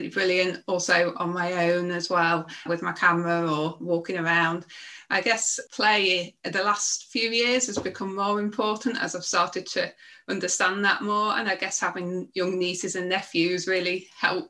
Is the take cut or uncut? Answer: cut